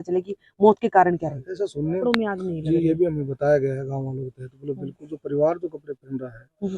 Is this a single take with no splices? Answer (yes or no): no